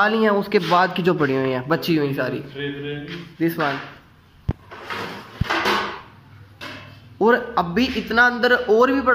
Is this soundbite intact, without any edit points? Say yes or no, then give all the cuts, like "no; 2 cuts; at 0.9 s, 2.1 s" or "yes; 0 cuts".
yes; 0 cuts